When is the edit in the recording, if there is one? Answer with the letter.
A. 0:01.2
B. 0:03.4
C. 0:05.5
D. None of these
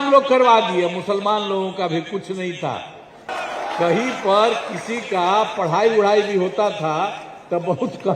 B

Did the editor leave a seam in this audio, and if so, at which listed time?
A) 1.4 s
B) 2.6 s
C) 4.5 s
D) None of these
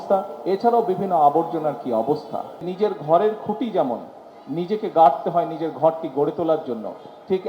B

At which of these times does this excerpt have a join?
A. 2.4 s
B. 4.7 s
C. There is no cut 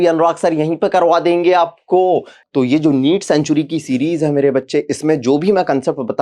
A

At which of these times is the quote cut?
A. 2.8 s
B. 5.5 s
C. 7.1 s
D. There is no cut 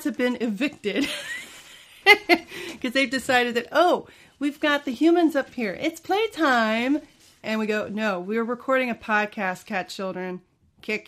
D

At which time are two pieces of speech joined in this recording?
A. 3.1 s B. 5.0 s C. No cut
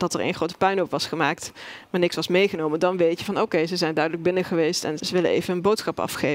B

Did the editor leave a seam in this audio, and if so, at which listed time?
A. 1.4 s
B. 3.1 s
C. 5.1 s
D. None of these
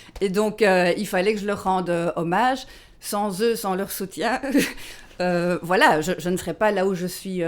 D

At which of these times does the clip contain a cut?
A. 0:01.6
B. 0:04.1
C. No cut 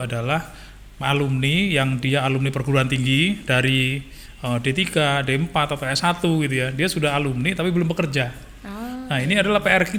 C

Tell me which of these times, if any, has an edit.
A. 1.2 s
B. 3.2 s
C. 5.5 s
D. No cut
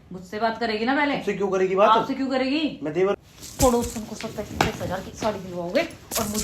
B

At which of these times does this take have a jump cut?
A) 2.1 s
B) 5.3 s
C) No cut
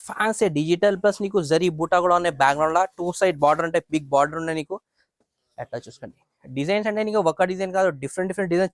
C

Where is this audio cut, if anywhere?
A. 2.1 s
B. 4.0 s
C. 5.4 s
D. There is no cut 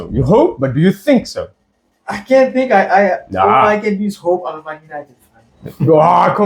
D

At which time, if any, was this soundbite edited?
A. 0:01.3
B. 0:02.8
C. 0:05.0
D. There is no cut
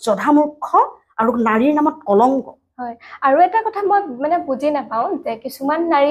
D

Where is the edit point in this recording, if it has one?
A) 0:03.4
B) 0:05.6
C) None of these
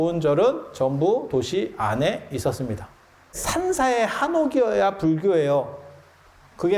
A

